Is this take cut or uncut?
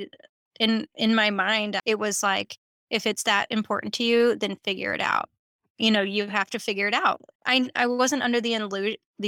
cut